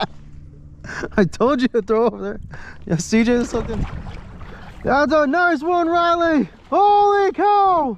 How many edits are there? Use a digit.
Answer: 1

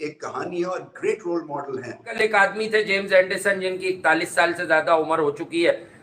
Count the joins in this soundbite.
1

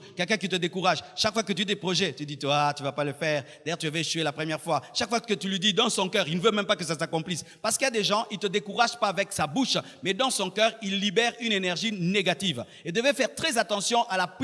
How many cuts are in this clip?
0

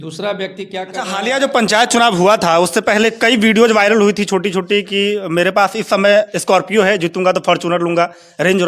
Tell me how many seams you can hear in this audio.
1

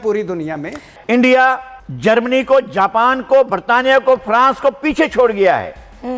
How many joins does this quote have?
1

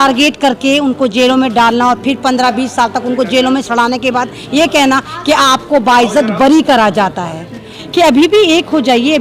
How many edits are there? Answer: 1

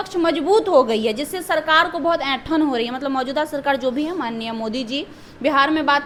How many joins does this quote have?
0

